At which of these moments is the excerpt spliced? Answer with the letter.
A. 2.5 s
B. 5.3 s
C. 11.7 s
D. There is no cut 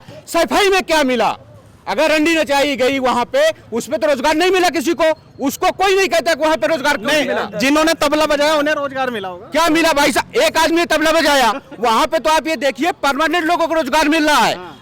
D